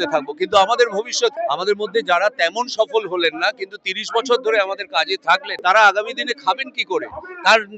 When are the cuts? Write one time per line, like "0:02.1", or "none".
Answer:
0:01.4
0:05.5